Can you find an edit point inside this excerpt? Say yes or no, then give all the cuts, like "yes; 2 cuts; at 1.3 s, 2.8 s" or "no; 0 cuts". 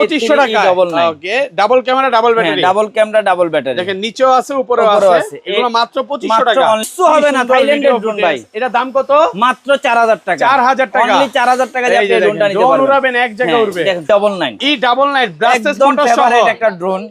yes; 2 cuts; at 6.9 s, 14.0 s